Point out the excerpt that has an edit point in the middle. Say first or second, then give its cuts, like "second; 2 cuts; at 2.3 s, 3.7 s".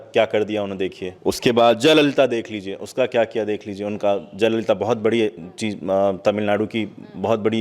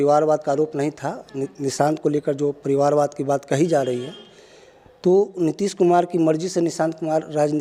first; 1 cut; at 1.1 s